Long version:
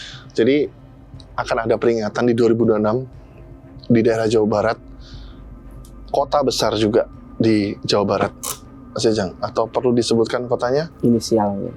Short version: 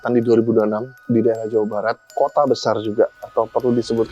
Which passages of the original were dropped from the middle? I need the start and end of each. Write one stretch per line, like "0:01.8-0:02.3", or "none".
0:03.0-0:03.7
0:04.9-0:06.0
0:07.2-0:09.4